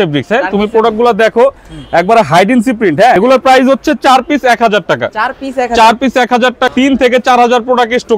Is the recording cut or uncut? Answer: cut